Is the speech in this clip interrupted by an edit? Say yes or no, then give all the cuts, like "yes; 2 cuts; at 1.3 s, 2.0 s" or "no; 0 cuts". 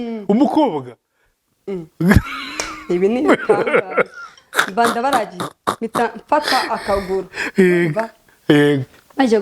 no; 0 cuts